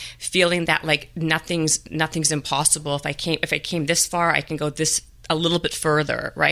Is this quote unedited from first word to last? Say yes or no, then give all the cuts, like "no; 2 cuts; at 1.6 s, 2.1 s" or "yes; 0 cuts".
yes; 0 cuts